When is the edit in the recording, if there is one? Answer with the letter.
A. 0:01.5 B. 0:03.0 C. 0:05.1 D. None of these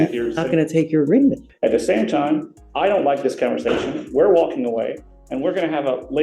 A